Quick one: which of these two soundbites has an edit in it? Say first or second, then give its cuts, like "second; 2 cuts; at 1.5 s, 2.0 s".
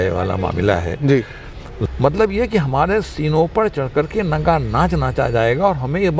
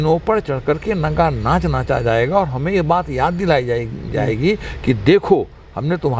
first; 1 cut; at 1.8 s